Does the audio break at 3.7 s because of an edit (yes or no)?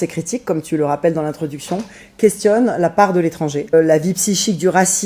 yes